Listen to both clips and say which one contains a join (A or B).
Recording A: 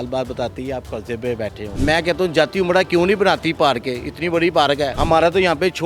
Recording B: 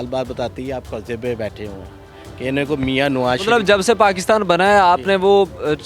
A